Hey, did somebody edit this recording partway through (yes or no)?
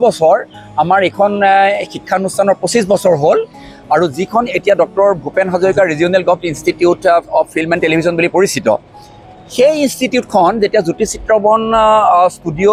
no